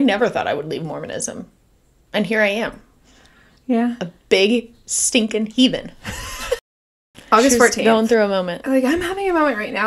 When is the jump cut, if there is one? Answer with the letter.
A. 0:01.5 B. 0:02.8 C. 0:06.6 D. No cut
C